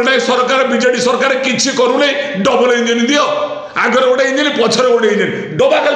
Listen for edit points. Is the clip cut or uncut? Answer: uncut